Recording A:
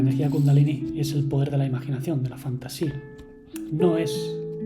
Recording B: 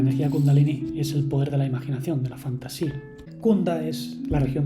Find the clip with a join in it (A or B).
B